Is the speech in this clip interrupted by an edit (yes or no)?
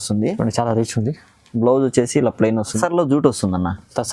yes